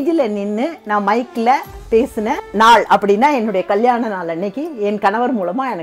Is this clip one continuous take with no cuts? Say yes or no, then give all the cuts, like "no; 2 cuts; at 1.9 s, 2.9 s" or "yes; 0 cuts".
no; 1 cut; at 2.4 s